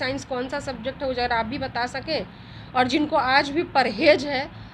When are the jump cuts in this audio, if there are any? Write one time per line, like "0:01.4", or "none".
none